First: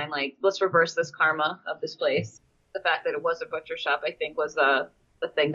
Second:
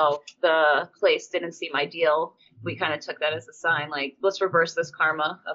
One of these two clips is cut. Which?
second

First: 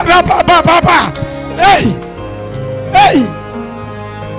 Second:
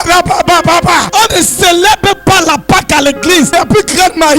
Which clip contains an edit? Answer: second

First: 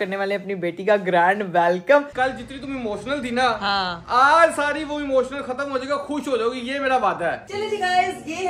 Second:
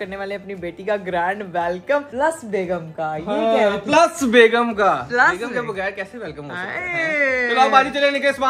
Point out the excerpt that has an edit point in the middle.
first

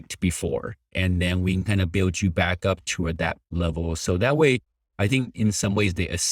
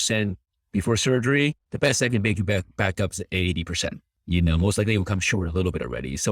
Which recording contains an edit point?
second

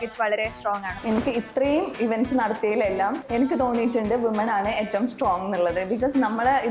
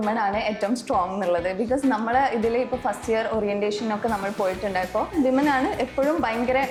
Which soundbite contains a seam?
first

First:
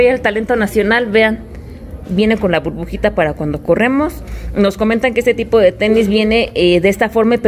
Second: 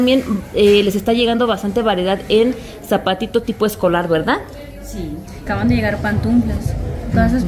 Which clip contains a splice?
second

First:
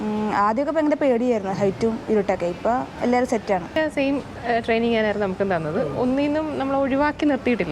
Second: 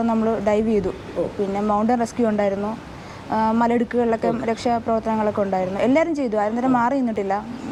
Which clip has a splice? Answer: first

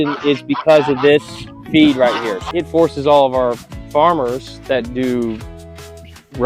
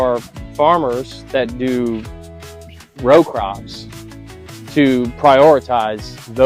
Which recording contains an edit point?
first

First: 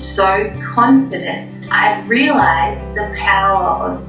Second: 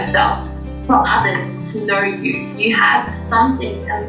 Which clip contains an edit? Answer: first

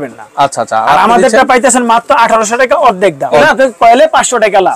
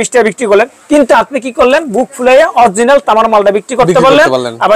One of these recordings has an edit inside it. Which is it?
first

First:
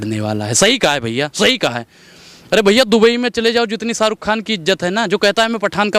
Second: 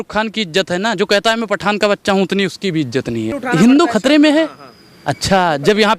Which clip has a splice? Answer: second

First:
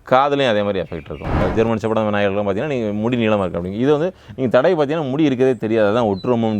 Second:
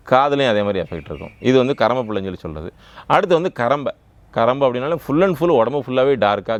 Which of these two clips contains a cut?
first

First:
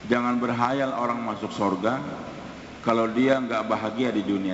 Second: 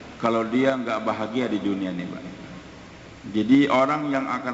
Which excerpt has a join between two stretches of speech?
second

